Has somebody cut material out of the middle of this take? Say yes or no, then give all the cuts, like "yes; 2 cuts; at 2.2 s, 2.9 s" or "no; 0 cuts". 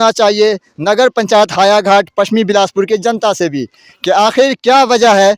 no; 0 cuts